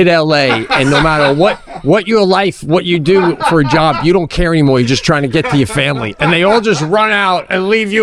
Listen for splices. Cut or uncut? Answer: uncut